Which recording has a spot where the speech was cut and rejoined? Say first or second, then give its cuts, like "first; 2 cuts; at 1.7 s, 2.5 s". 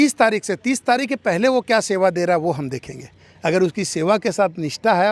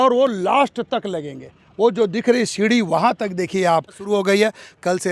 second; 1 cut; at 4.1 s